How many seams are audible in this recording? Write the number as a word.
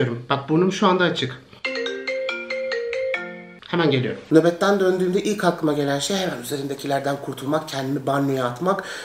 one